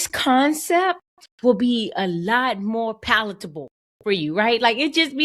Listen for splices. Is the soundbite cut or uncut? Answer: uncut